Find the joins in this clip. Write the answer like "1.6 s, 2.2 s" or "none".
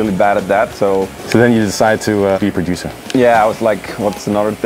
1.2 s, 2.4 s